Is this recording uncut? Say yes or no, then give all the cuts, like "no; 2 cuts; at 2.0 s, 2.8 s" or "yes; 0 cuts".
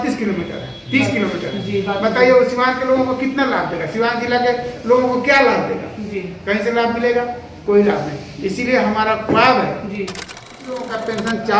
no; 1 cut; at 10.6 s